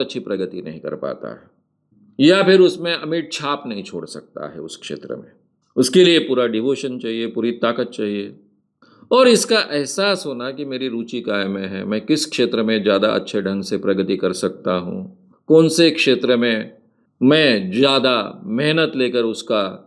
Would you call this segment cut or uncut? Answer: uncut